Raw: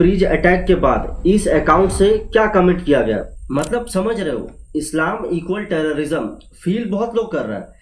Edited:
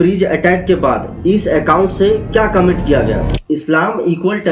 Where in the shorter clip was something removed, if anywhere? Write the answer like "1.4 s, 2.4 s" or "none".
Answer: 3.3 s